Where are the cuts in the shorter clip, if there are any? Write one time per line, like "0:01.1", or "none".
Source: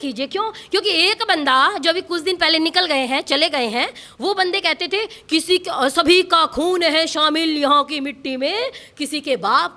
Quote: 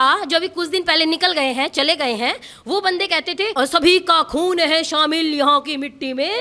0:03.5